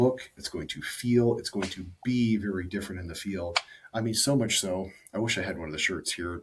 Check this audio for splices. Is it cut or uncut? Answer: uncut